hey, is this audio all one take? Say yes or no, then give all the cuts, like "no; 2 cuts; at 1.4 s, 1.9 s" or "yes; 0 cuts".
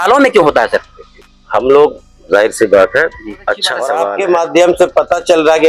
no; 1 cut; at 3.9 s